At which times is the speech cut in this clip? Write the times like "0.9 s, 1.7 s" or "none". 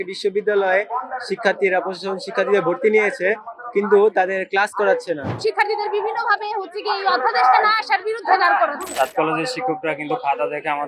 5.3 s, 8.8 s